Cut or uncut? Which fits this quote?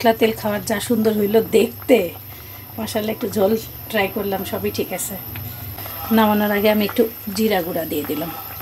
uncut